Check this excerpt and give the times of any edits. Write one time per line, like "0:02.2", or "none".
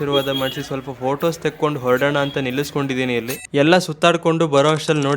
0:03.4